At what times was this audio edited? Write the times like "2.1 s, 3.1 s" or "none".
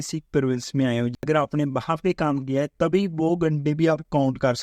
1.2 s